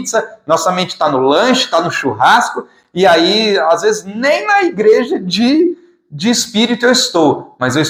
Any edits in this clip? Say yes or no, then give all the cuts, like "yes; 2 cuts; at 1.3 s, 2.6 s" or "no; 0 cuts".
no; 0 cuts